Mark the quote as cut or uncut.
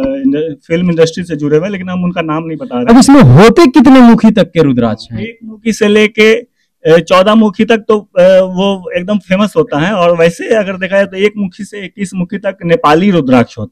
cut